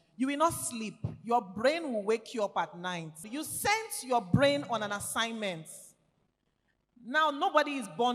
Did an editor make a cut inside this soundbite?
yes; 1 cut; at 3.3 s

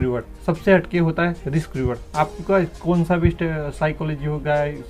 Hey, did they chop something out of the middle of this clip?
no; 0 cuts

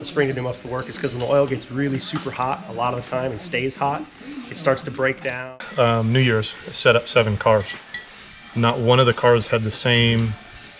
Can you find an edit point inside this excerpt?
yes; 1 cut; at 5.3 s

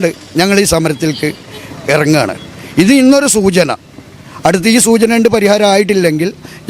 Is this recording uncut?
yes; 0 cuts

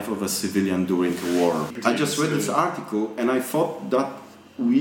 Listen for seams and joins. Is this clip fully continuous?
no; 1 cut; at 1.7 s

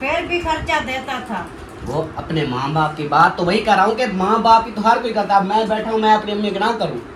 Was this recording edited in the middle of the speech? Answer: no; 0 cuts

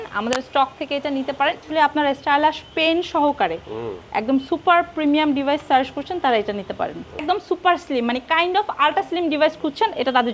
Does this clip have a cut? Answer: yes; 2 cuts; at 1.6 s, 7.2 s

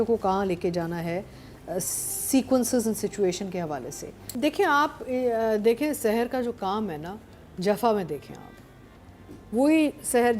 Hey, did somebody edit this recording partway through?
yes; 1 cut; at 4.3 s

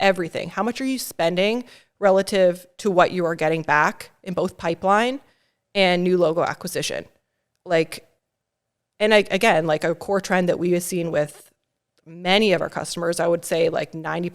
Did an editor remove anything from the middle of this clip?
no; 0 cuts

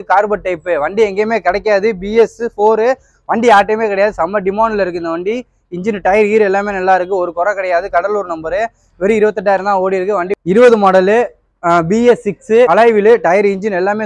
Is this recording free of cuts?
no; 2 cuts; at 10.3 s, 12.7 s

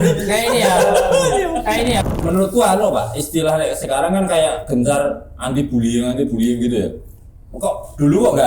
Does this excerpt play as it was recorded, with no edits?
no; 1 cut; at 2.1 s

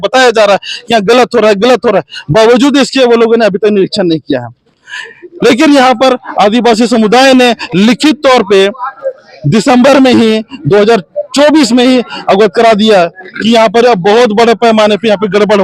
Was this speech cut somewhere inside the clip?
no; 0 cuts

